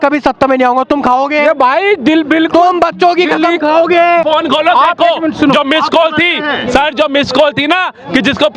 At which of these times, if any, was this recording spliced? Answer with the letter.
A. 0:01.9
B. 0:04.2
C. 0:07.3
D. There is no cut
B